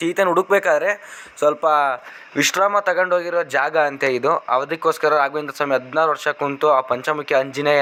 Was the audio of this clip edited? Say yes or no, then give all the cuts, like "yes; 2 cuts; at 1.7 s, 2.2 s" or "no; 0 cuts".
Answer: no; 0 cuts